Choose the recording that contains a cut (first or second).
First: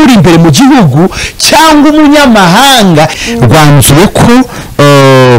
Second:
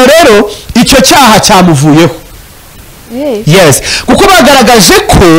first